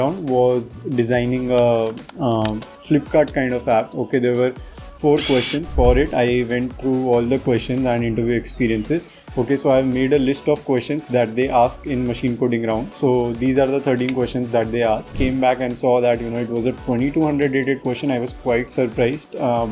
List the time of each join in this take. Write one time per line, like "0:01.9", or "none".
0:05.7
0:15.1